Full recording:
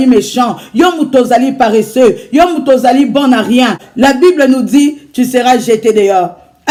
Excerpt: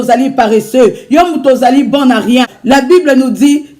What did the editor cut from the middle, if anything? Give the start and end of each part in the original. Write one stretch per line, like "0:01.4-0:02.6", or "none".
0:03.8-0:03.9